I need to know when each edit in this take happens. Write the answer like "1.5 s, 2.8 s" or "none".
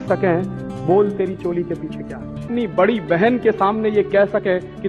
2.5 s